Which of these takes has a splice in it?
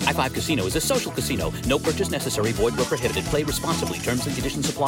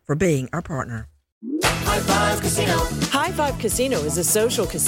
second; 1 cut; at 1.4 s

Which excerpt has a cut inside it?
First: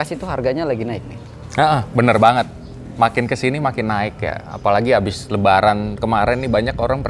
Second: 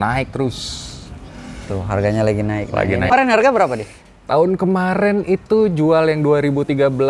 second; 1 cut; at 3.1 s

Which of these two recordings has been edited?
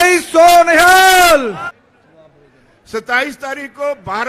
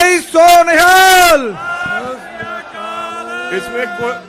first; 1 cut; at 1.7 s

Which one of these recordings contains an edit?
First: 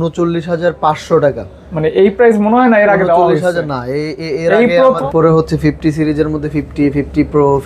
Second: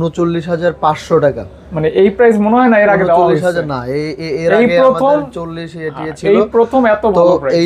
first; 1 cut; at 5.0 s

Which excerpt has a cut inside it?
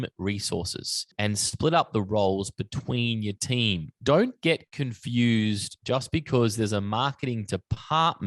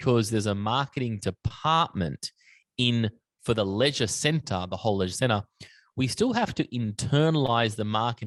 first; 2 cuts; at 1.1 s, 3.9 s

